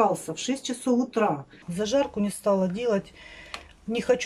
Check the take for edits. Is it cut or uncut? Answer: cut